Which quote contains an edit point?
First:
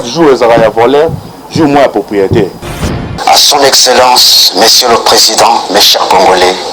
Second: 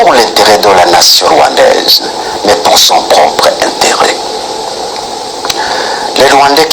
first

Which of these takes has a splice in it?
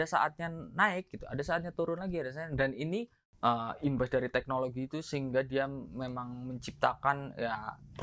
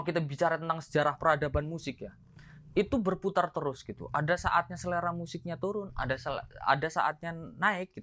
first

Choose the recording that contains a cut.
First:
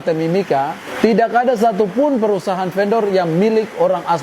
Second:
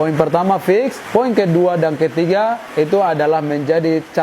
second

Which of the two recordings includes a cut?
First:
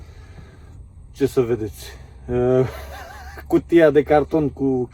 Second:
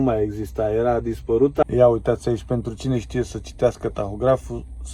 second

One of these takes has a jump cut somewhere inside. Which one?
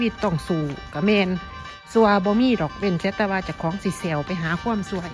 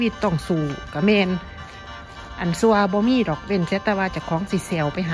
first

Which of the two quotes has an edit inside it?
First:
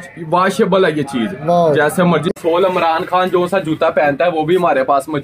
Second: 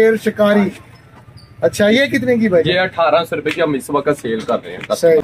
first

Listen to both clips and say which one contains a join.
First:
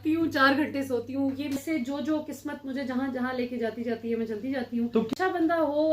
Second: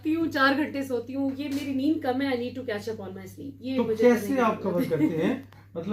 first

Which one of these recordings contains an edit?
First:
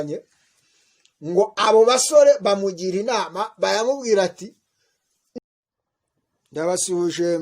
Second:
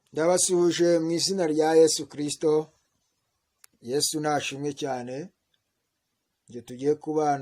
first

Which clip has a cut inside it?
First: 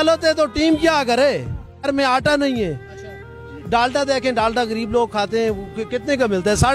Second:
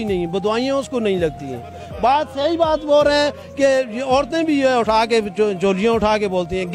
first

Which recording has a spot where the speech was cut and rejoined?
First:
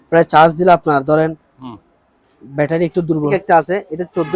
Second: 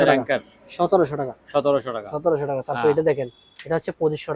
first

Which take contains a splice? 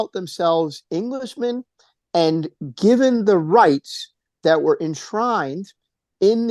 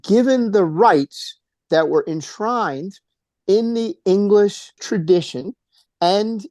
second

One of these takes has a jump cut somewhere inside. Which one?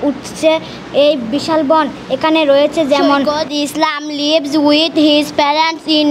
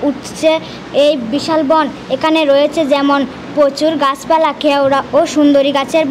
first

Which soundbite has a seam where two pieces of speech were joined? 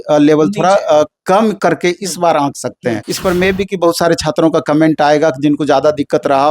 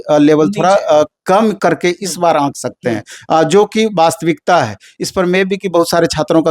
first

